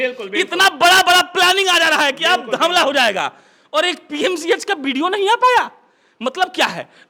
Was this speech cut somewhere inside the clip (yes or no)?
no